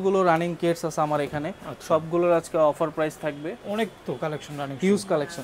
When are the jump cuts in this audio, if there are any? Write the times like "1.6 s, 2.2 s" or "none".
none